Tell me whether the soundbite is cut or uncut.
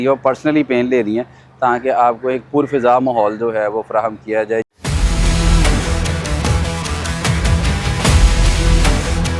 uncut